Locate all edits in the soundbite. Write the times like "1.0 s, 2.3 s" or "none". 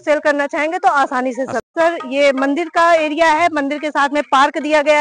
1.7 s